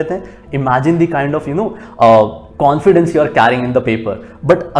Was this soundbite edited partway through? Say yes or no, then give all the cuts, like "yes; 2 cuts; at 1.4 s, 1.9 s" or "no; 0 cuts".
yes; 1 cut; at 2.4 s